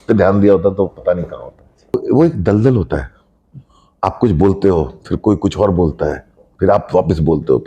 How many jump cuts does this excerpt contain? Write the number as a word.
one